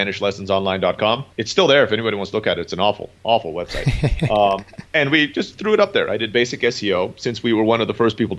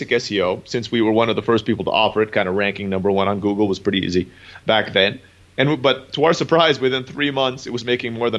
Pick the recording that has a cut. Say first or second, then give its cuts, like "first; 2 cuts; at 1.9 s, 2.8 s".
first; 2 cuts; at 1.3 s, 4.8 s